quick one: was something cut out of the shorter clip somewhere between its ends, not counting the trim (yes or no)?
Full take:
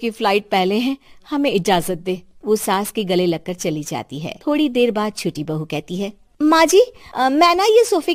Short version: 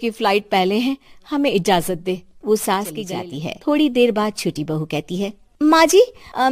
yes